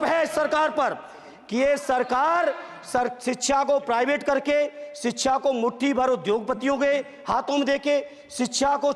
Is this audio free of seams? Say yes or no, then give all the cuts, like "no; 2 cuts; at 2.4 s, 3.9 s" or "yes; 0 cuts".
yes; 0 cuts